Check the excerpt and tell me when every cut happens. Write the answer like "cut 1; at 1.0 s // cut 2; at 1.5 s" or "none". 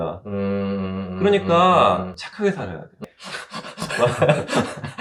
none

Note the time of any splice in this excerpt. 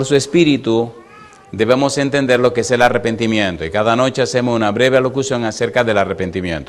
none

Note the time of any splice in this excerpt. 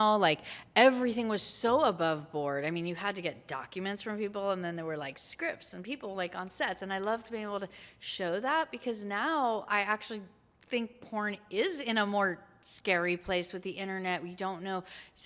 none

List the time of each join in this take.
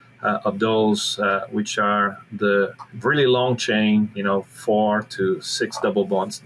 cut 1; at 2.9 s // cut 2; at 4.1 s

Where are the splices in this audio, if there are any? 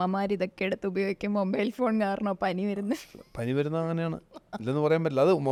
none

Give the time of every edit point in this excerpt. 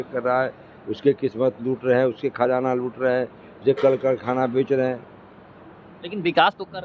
none

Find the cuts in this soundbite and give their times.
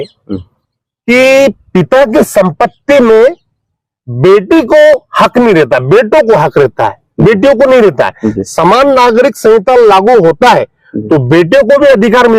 none

